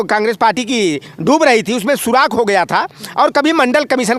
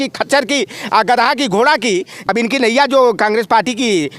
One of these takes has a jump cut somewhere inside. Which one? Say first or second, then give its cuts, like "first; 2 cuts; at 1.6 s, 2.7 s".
second; 1 cut; at 2.2 s